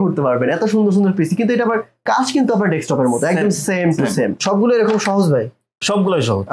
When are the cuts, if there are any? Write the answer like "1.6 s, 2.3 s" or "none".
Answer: 4.4 s

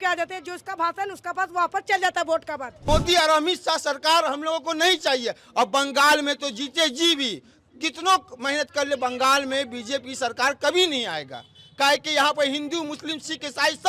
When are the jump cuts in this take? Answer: 2.9 s

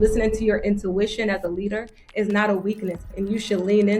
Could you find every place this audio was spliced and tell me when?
3.1 s

